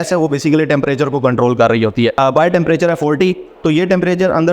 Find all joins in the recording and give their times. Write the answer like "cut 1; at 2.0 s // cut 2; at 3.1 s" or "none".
cut 1; at 2.1 s